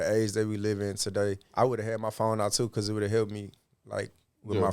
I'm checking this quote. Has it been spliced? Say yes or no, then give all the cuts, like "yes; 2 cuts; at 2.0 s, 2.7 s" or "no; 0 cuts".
yes; 1 cut; at 1.4 s